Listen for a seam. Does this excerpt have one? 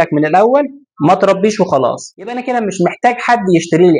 yes; 1 cut; at 2.4 s

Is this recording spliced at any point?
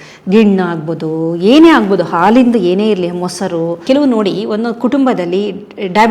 yes; 1 cut; at 3.8 s

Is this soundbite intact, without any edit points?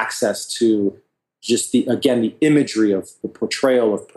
no; 1 cut; at 3.1 s

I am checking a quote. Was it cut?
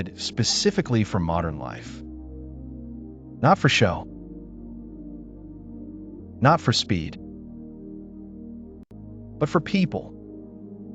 yes; 5 cuts; at 1.8 s, 3.0 s, 4.0 s, 6.0 s, 10.2 s

